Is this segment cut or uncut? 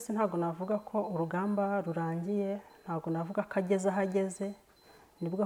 uncut